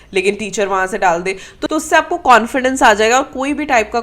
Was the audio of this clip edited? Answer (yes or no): yes